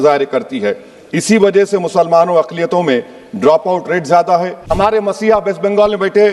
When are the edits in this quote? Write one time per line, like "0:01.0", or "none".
0:04.7